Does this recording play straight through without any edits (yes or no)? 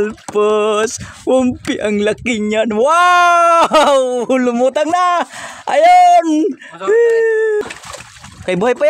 no